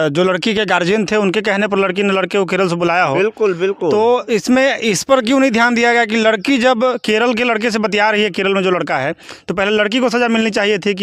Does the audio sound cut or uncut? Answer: uncut